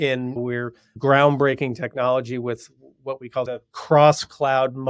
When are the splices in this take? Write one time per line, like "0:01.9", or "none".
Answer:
0:01.0